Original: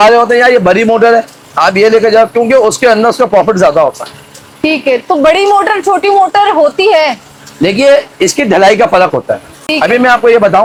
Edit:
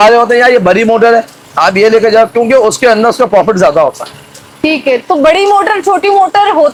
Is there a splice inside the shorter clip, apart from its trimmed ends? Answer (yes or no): no